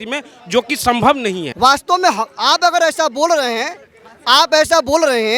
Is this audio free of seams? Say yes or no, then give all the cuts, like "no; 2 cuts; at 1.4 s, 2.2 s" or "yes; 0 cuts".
no; 1 cut; at 1.5 s